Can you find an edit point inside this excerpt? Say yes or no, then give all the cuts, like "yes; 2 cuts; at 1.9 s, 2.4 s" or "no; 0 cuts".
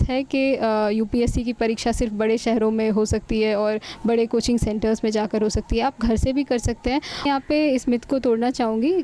yes; 1 cut; at 7.2 s